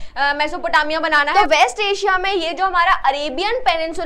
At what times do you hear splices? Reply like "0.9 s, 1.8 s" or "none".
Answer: 1.3 s